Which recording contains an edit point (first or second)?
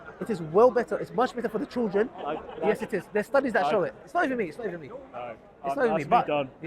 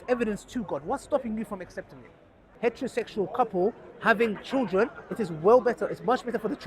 second